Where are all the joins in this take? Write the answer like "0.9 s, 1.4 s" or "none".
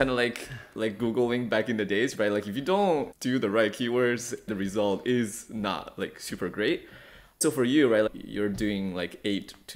3.1 s, 4.5 s, 7.4 s, 8.1 s

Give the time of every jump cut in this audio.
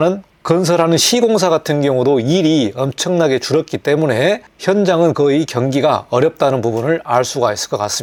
none

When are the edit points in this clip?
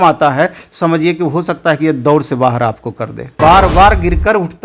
3.2 s

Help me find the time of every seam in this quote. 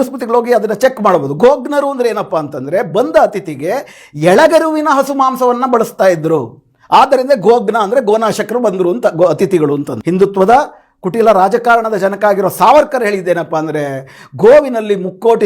9.9 s

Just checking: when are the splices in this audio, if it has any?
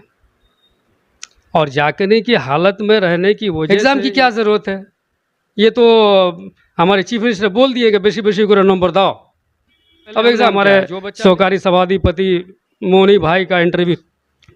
3.6 s, 10.5 s

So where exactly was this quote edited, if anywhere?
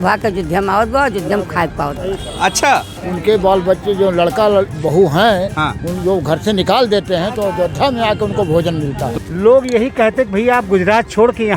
3.0 s, 9.1 s

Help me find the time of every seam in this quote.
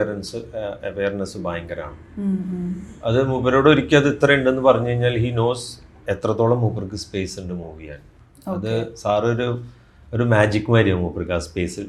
none

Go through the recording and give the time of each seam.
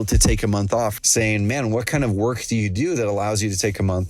1.0 s

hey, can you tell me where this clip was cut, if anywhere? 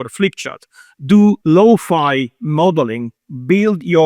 1.4 s

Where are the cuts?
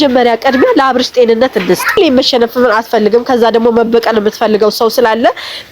2.0 s

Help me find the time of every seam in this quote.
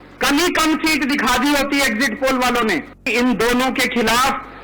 3.1 s

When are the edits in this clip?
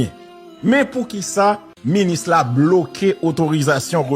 1.7 s

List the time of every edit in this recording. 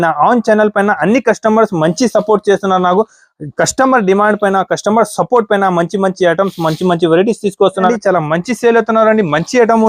7.9 s

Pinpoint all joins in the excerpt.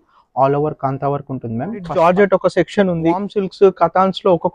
1.9 s, 3.4 s

